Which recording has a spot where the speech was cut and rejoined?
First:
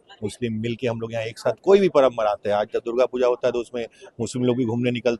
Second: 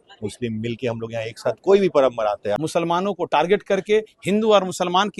second; 1 cut; at 2.6 s

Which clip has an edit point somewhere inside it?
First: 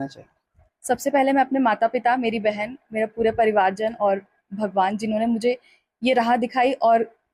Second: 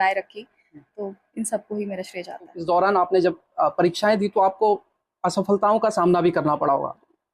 second; 1 cut; at 2.6 s

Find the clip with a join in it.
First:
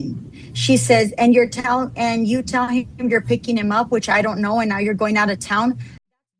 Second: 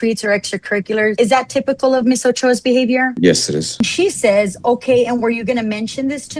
second; 2 cuts; at 1.1 s, 3.8 s

